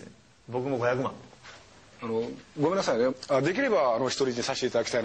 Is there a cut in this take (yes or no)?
yes